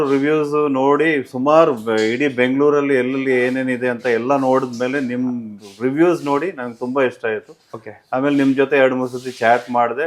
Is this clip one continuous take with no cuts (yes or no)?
yes